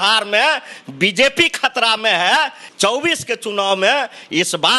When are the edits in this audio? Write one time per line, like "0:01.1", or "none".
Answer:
0:02.6